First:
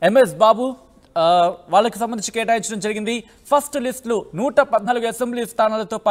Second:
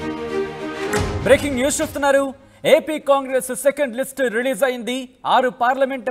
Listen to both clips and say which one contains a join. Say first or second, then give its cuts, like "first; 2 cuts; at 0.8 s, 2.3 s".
second; 1 cut; at 1.2 s